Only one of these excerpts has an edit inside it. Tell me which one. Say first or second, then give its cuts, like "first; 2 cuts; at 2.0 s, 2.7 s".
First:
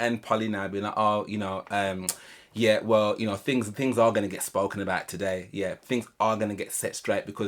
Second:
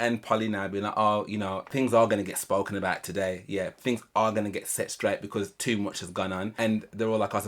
second; 2 cuts; at 1.7 s, 6.5 s